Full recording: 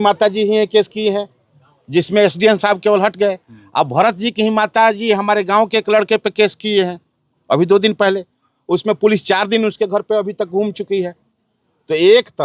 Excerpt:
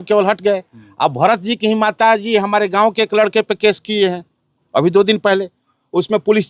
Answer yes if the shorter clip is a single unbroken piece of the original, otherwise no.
yes